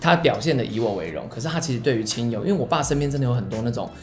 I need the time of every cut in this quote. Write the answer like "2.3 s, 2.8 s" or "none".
none